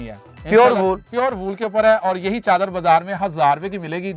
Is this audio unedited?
yes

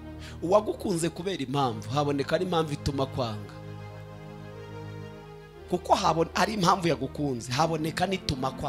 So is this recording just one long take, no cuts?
yes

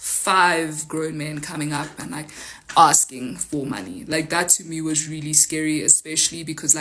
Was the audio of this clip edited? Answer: no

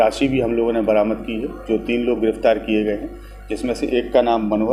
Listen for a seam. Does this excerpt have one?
no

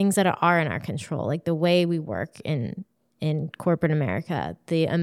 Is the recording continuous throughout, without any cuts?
yes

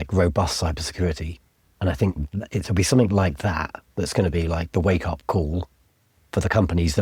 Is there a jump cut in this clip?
no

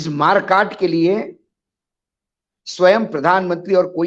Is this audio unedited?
yes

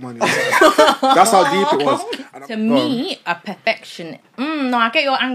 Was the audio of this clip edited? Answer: yes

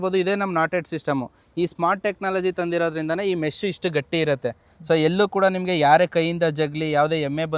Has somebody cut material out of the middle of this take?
no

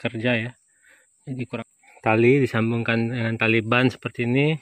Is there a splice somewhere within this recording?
yes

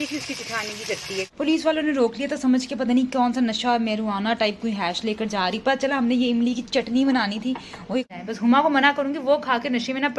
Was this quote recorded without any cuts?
no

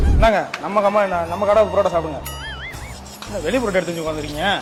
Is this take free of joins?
yes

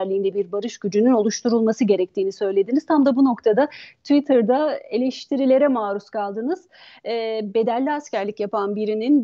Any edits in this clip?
no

